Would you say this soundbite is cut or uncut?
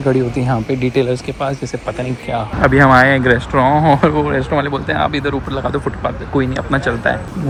uncut